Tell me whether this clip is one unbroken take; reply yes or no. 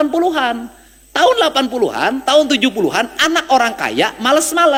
yes